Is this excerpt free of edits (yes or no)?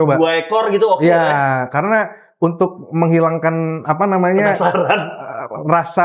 yes